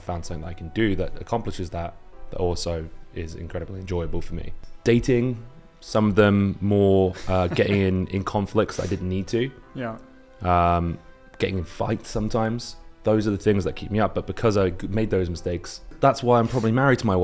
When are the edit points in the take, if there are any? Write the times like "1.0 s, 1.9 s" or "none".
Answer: 4.6 s, 15.9 s